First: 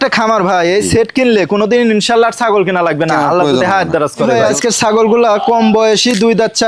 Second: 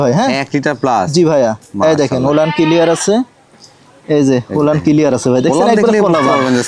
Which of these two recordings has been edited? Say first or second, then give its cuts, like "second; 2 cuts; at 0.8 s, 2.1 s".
first; 1 cut; at 4.4 s